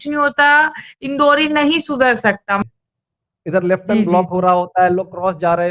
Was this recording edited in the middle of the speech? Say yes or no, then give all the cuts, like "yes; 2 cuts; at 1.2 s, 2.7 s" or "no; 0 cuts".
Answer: yes; 1 cut; at 2.6 s